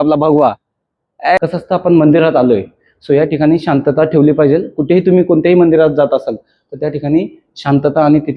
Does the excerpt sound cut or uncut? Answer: cut